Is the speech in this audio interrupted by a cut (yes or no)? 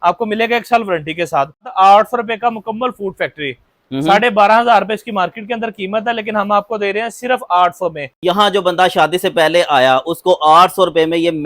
yes